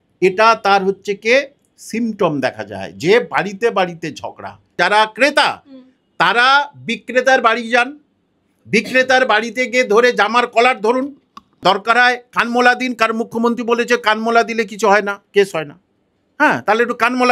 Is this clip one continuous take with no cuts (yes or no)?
no